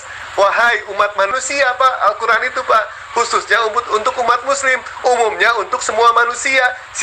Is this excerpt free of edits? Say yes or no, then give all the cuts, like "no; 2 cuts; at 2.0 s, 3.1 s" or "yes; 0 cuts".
no; 1 cut; at 1.4 s